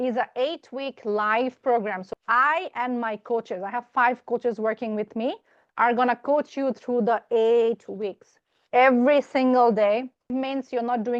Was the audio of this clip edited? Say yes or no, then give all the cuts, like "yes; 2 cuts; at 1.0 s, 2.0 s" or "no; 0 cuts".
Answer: yes; 3 cuts; at 2.0 s, 5.5 s, 10.3 s